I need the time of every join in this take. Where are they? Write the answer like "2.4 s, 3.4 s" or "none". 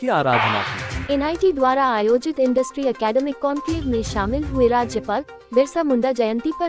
1.0 s